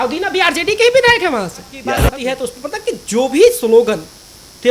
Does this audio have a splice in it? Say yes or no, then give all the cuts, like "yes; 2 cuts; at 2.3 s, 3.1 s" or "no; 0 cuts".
yes; 1 cut; at 2.0 s